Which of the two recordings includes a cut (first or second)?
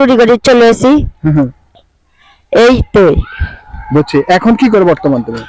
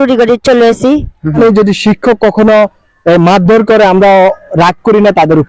second